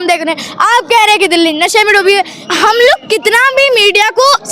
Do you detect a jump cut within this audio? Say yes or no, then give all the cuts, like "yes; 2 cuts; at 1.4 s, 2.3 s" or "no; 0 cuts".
yes; 1 cut; at 2.4 s